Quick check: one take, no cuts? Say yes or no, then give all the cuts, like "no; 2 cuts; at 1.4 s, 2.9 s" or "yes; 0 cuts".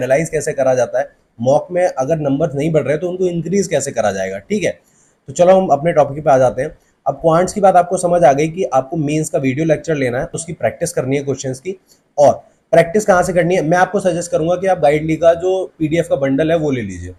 yes; 0 cuts